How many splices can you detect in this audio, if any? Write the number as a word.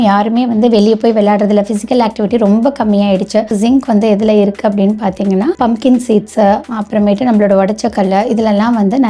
two